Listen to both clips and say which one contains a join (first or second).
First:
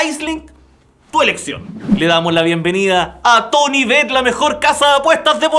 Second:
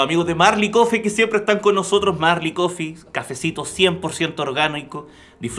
first